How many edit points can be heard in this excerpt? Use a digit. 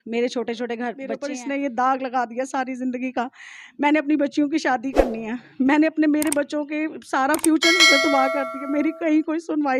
1